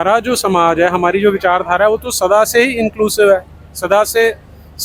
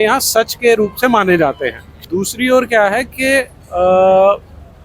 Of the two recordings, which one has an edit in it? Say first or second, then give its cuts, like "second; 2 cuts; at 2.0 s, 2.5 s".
second; 1 cut; at 2.0 s